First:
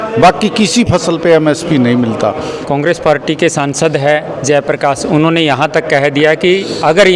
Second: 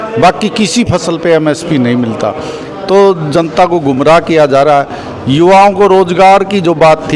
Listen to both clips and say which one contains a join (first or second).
first